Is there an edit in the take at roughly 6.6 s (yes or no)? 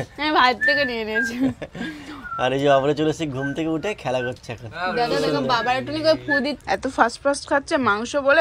yes